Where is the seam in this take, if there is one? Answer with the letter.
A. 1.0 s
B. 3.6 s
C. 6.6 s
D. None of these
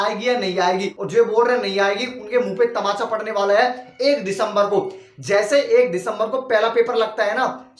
A